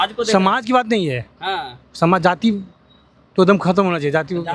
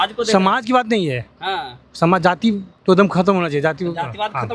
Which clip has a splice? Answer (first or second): second